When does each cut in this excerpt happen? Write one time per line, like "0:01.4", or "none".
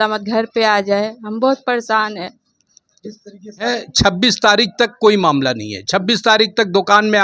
0:03.7